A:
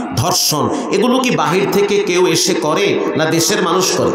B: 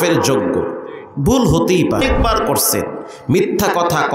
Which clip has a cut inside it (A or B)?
B